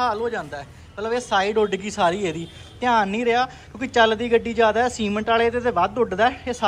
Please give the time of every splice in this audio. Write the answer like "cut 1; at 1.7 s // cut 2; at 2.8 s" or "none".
none